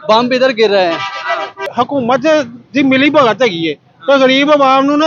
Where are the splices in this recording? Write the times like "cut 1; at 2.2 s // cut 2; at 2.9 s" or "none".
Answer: cut 1; at 1.7 s